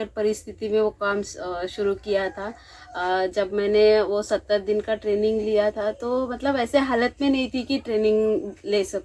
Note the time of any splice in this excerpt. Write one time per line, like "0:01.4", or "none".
0:06.6